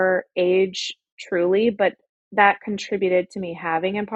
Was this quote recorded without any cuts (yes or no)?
yes